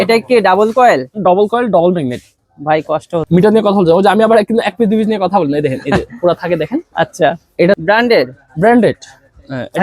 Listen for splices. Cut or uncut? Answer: cut